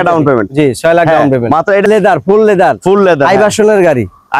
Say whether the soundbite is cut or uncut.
cut